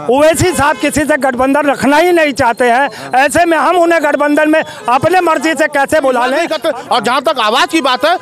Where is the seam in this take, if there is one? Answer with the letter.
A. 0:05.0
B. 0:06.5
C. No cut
B